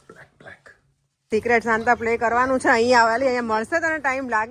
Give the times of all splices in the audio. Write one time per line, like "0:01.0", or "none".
0:01.3